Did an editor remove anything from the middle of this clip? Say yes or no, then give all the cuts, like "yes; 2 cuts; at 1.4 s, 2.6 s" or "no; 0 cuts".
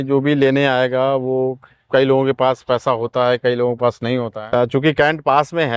yes; 1 cut; at 4.3 s